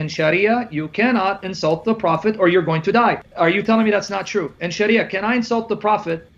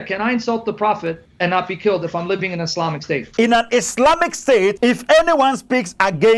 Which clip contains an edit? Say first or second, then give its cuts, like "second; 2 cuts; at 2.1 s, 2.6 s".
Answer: second; 2 cuts; at 3.3 s, 4.8 s